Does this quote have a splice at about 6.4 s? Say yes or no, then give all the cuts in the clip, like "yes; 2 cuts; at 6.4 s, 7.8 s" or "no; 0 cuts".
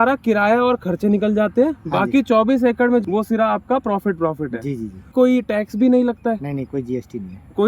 no; 2 cuts; at 3.0 s, 5.1 s